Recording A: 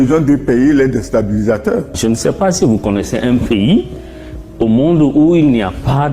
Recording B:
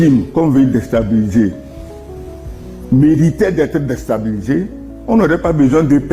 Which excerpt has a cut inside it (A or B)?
A